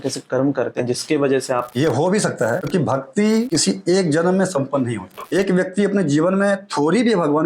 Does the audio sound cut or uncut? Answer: cut